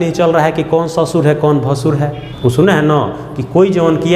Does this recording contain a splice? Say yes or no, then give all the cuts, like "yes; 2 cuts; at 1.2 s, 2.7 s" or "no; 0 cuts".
yes; 1 cut; at 2.3 s